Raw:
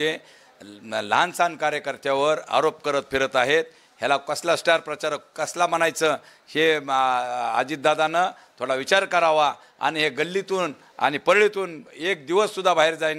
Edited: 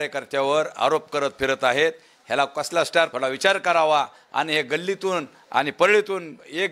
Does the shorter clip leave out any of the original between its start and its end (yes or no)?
yes